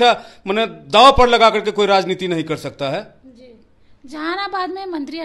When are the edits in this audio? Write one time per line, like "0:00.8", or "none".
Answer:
none